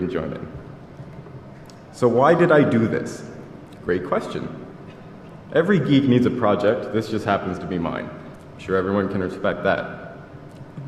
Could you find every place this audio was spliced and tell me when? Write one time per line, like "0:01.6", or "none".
none

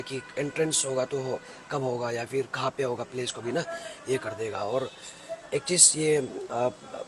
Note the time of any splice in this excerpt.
none

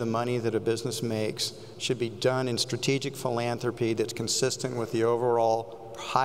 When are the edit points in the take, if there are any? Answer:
none

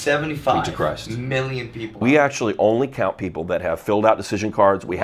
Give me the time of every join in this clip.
0:01.9

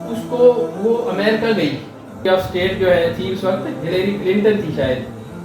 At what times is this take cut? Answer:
0:02.2

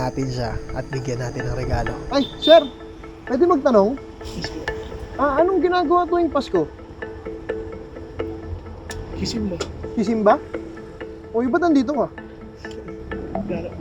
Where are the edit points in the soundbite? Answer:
0:02.0

